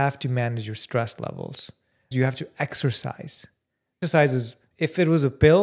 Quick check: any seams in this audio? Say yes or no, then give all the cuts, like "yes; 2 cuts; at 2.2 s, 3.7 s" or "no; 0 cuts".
yes; 2 cuts; at 2.1 s, 4.0 s